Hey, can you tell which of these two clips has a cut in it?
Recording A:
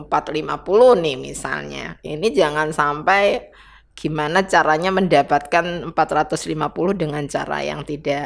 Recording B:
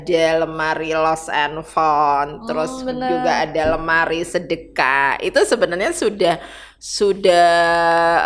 A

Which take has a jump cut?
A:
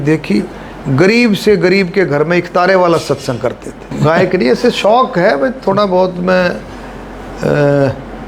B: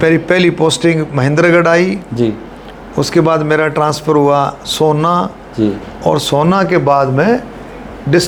A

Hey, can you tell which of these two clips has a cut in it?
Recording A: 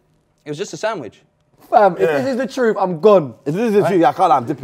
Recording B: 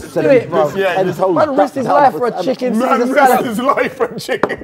A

